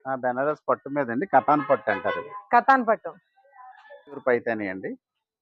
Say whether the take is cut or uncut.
cut